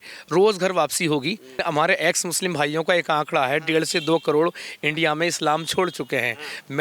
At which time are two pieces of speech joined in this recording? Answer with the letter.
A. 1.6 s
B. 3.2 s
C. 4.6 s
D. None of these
A